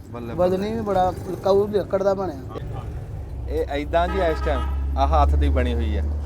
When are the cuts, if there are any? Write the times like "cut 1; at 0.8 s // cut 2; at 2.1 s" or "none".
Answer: cut 1; at 2.5 s